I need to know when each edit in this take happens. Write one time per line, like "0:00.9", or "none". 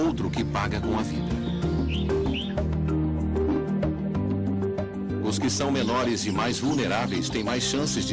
none

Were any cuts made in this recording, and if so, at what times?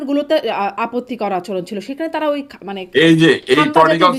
none

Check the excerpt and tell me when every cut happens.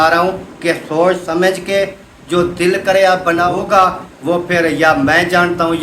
0:03.6

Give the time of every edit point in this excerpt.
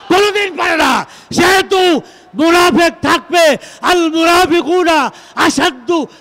none

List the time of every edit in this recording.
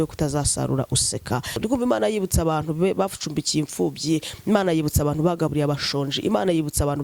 0:01.6

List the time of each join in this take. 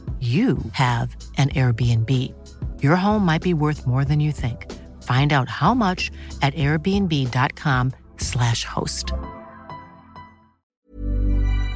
0:10.6

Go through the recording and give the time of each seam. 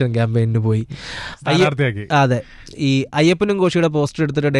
none

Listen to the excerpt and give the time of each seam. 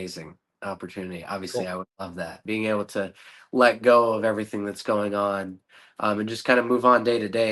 0:02.4

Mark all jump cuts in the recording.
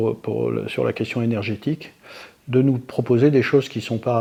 none

